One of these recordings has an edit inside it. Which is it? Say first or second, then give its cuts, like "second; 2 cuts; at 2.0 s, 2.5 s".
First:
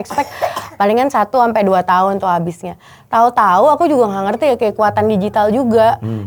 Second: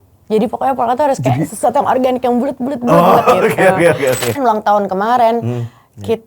second; 1 cut; at 4.4 s